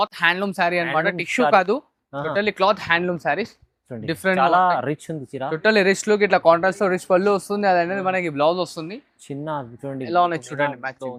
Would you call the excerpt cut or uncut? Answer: uncut